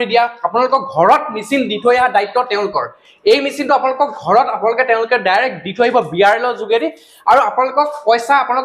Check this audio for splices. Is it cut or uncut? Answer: uncut